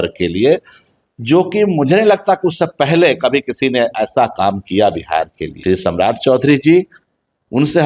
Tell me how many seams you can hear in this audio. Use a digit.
1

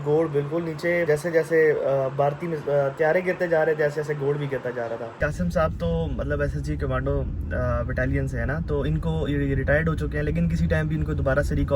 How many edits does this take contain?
2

